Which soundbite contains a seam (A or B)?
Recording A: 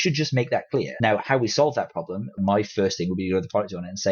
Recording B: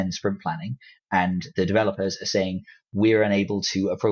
A